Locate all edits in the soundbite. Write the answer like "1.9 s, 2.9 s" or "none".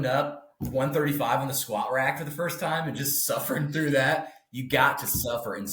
none